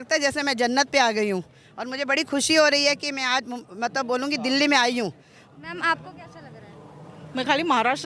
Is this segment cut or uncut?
uncut